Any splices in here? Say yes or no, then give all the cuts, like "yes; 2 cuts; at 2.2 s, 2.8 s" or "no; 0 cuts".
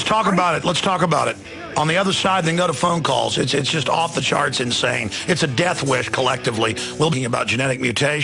no; 0 cuts